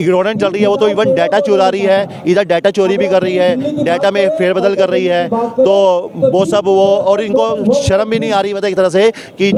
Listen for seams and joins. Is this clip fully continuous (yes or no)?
yes